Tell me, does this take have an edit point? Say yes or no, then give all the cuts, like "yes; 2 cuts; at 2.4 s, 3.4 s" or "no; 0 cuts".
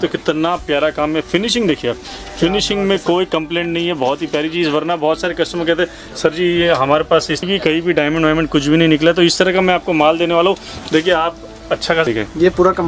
yes; 2 cuts; at 7.4 s, 12.1 s